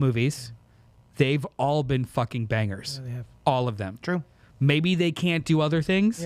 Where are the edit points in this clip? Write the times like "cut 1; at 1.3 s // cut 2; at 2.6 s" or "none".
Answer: none

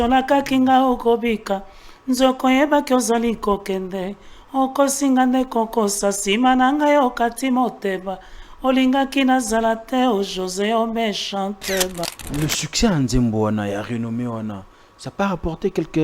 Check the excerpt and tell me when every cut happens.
cut 1; at 12.2 s

